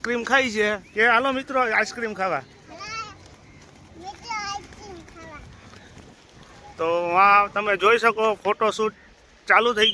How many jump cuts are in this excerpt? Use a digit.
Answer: 0